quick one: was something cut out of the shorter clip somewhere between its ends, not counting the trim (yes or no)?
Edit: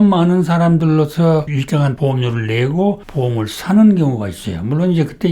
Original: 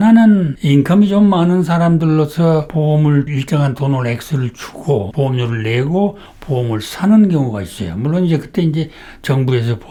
yes